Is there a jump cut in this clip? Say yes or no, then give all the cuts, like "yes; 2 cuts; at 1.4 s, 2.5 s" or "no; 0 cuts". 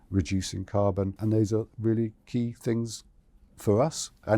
yes; 1 cut; at 1.2 s